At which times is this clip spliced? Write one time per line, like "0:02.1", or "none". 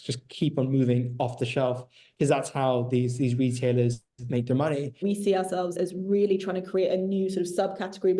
0:05.0